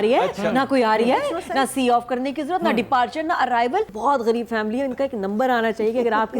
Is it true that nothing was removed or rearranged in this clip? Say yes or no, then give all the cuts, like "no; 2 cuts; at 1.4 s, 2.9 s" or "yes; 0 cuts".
no; 1 cut; at 3.9 s